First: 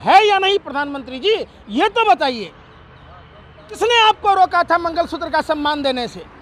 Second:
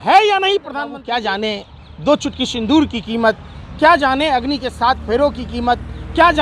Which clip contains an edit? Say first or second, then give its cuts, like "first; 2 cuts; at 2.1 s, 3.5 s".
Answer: second; 1 cut; at 1.0 s